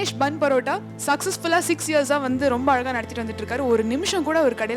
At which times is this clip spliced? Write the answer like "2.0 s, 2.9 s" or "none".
0.9 s